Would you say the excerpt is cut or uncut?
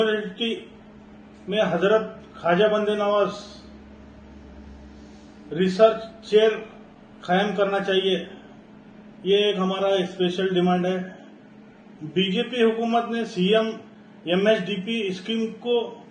cut